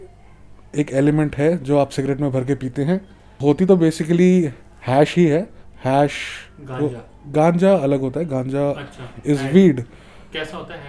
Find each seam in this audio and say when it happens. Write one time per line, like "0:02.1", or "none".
0:03.4